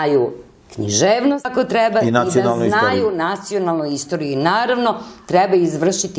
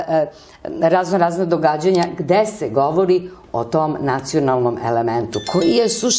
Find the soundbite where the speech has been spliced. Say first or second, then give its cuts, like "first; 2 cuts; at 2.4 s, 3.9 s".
first; 1 cut; at 1.5 s